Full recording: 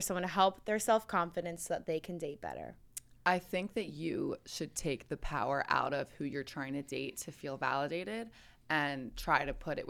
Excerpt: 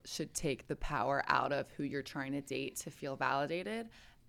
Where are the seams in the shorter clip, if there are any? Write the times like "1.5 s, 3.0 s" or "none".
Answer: none